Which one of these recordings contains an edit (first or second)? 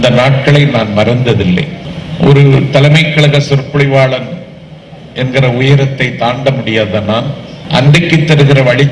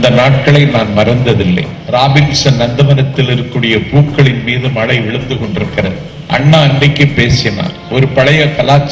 second